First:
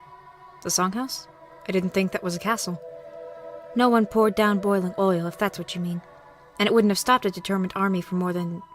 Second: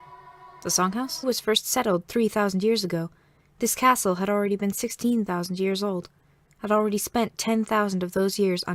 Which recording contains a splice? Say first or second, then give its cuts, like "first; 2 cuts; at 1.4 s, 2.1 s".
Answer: first; 1 cut; at 1.2 s